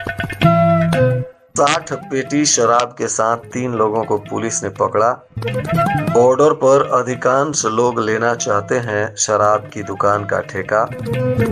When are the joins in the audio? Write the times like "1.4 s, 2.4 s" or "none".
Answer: 1.3 s